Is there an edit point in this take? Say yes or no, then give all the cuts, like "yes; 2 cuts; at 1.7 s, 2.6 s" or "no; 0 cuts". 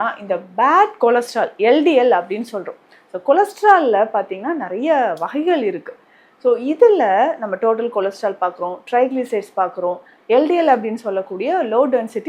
no; 0 cuts